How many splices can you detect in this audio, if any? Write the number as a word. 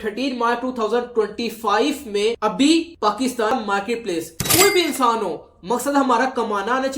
one